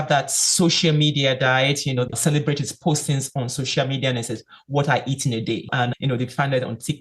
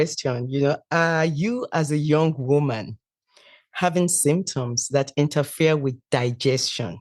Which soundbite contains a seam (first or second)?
first